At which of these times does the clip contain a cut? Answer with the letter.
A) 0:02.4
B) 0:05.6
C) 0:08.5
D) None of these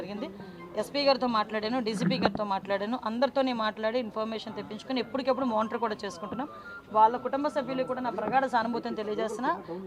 D